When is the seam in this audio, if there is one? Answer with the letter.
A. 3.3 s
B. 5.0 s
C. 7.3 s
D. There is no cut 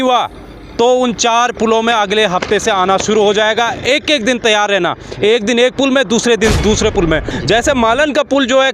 C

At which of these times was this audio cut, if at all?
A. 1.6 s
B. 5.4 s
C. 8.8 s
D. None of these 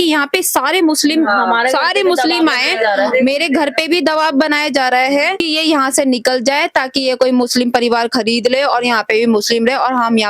B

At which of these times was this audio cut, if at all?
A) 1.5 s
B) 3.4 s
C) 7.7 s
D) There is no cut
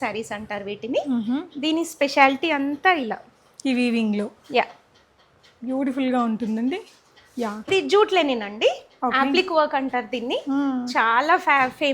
C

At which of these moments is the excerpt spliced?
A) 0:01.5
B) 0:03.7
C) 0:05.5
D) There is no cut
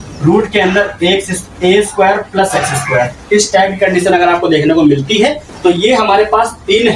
C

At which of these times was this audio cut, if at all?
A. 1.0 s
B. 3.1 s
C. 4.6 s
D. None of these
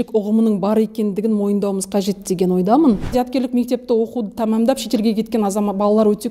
B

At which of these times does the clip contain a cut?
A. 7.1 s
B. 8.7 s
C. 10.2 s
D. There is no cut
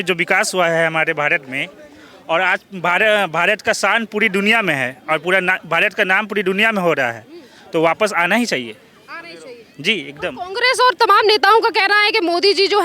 D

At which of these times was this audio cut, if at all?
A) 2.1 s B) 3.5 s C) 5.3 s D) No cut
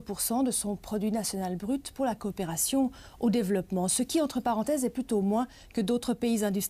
D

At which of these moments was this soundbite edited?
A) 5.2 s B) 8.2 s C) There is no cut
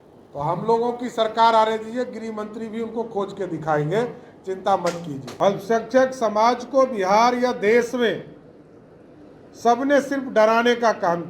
A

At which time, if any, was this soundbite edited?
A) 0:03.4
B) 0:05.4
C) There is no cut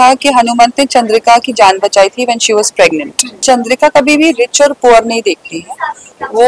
A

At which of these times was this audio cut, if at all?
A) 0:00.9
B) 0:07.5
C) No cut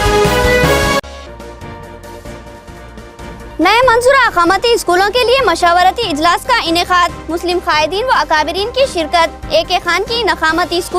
A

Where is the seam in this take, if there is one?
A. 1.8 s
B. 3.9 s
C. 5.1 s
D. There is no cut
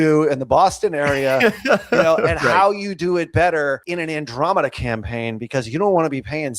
B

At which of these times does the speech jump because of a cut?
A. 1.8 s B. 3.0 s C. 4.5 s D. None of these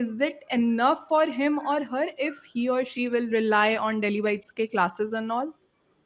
D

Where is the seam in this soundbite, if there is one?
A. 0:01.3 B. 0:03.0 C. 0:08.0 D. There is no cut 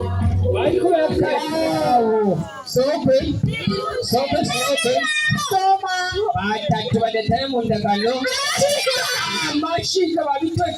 A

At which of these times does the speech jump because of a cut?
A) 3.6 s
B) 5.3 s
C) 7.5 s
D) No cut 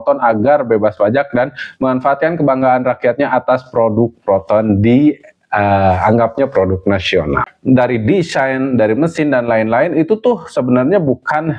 C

